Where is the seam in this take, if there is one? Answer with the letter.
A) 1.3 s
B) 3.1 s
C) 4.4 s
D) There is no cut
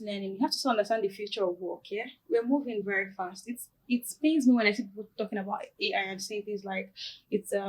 D